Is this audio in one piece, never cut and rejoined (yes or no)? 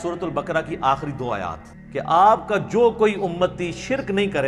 no